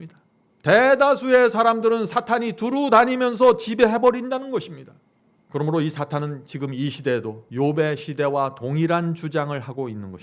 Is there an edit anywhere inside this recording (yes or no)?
yes